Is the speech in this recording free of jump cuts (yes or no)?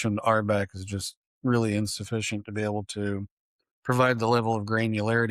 yes